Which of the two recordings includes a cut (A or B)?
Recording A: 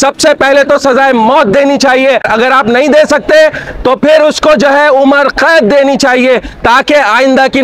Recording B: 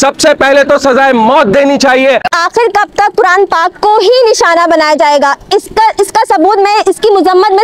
B